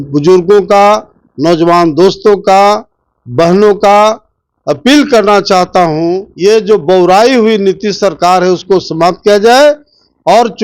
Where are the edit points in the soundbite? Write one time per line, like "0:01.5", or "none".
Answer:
0:06.3